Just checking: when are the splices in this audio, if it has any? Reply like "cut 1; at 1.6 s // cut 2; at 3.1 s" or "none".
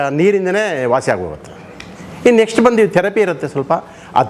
none